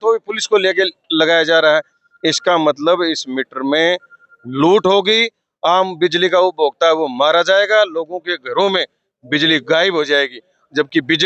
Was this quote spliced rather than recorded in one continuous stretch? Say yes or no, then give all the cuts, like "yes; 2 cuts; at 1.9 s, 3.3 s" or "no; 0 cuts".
no; 0 cuts